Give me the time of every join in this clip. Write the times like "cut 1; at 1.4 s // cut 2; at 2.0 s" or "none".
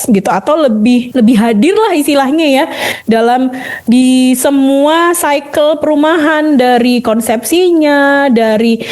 cut 1; at 1.1 s